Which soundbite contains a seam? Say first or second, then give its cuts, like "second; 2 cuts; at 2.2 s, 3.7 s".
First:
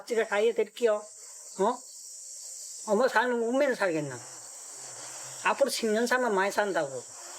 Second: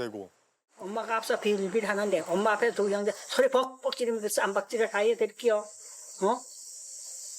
second; 1 cut; at 0.9 s